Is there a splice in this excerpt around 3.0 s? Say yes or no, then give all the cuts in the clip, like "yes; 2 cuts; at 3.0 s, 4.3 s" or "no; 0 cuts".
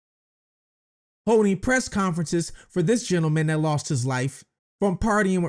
no; 0 cuts